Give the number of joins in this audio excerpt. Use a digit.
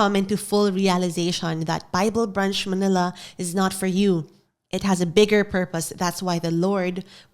0